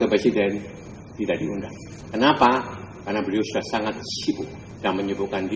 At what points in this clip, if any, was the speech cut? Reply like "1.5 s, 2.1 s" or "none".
1.9 s, 4.6 s

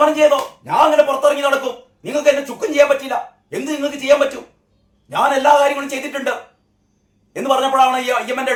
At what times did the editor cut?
none

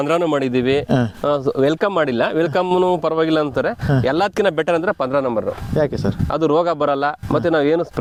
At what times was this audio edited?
none

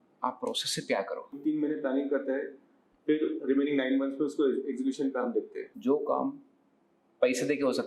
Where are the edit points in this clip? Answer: 1.3 s, 5.6 s

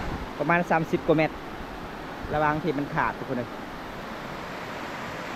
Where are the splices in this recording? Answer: none

